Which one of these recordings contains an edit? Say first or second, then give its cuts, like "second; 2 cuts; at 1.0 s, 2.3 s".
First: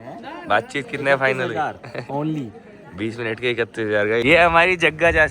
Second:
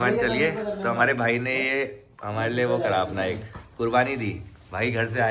first; 1 cut; at 4.2 s